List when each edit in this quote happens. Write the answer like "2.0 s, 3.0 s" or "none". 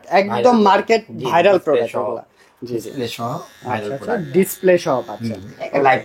none